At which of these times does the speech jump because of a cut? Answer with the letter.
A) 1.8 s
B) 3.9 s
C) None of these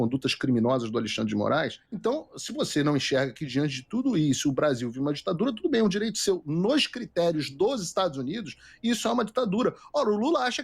A